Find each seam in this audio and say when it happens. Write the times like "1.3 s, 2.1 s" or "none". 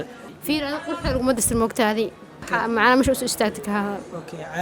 2.4 s